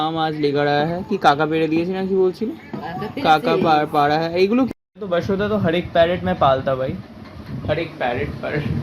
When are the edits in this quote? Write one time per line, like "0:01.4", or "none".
0:04.7